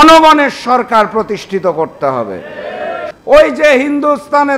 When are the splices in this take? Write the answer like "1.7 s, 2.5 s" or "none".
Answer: 3.1 s